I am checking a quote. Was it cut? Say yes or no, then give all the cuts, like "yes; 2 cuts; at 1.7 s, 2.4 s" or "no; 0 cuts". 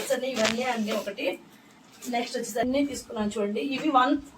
yes; 1 cut; at 2.6 s